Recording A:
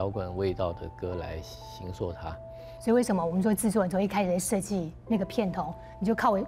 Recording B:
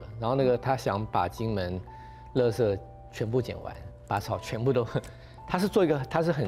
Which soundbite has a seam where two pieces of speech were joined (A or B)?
A